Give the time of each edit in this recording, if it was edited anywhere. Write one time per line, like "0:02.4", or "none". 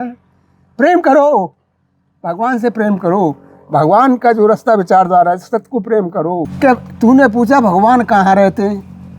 0:06.5